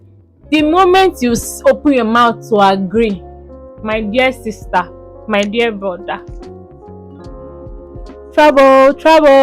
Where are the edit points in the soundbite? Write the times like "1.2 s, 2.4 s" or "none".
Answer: none